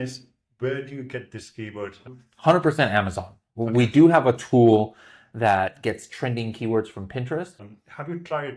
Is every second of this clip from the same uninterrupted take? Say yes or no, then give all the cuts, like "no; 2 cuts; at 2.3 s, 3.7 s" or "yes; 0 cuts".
no; 2 cuts; at 2.2 s, 7.6 s